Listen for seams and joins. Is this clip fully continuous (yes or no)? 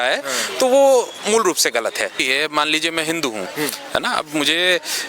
no